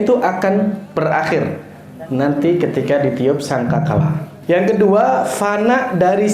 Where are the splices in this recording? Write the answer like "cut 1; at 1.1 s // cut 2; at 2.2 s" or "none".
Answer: cut 1; at 0.9 s // cut 2; at 4.3 s